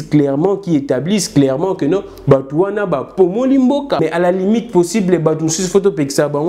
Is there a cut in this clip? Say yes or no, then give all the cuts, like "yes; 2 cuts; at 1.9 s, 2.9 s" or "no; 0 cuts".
yes; 1 cut; at 4.0 s